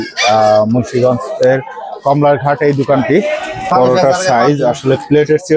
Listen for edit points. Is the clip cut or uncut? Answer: cut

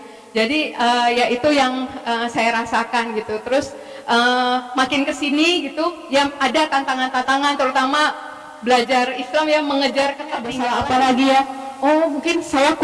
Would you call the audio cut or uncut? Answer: cut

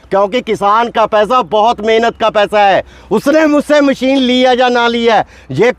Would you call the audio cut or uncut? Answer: uncut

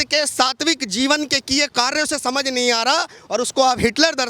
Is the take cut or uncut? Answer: uncut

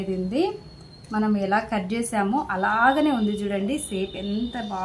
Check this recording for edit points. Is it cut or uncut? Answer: uncut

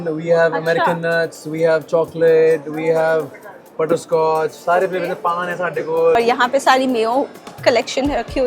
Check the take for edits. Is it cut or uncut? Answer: cut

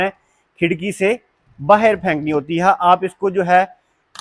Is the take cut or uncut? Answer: uncut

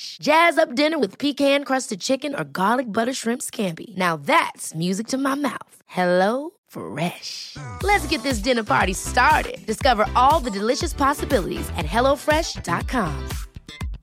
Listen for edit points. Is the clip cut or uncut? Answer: uncut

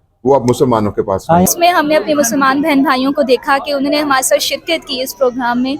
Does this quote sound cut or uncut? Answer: cut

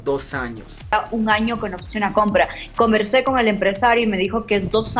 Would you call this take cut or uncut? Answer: cut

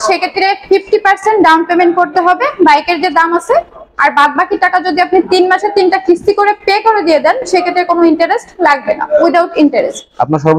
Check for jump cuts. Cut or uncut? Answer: uncut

